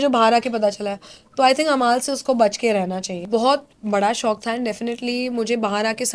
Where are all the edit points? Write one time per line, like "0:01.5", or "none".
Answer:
0:03.2